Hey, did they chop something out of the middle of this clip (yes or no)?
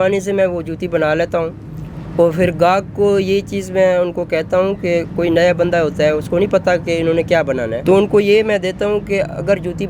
yes